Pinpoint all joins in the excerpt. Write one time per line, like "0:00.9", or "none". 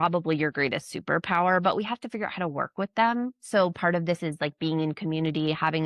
none